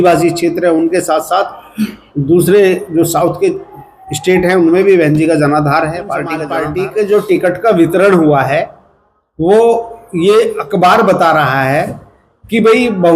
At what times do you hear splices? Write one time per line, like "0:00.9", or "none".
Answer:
0:06.5

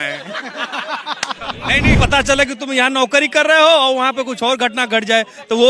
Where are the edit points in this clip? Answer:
0:02.0

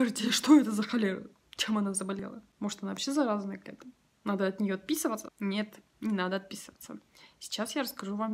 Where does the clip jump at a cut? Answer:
0:02.2
0:05.3

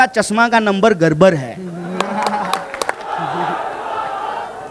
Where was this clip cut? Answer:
0:03.0

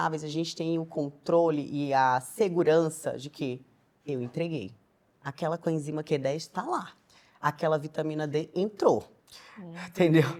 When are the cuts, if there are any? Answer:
none

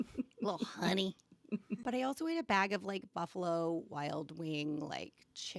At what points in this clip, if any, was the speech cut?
0:01.8

